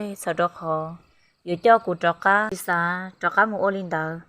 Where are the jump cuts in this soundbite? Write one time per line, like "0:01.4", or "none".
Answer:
0:02.6